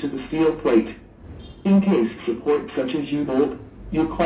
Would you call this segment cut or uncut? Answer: cut